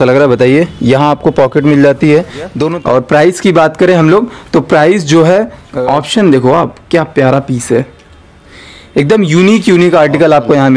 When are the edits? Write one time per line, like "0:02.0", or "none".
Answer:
0:02.7
0:05.6

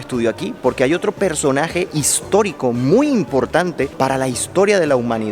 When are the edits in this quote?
none

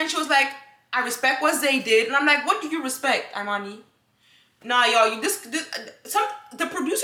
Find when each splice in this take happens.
none

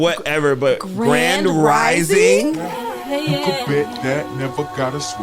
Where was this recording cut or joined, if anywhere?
0:02.7

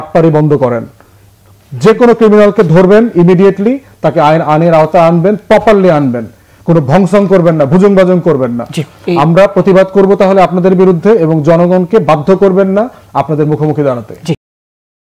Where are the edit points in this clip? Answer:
none

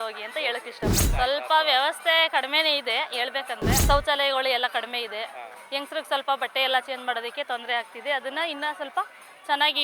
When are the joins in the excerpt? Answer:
0:01.0
0:03.8

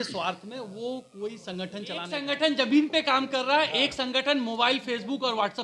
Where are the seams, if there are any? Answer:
0:02.2

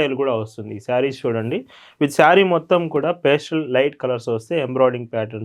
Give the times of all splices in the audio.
none

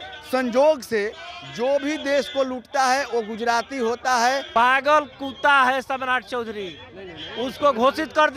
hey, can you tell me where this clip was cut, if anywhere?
0:04.5

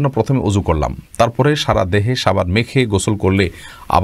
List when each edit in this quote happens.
none

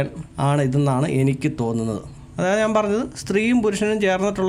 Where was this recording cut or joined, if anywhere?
0:02.1

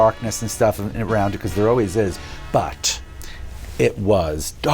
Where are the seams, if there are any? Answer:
0:02.2

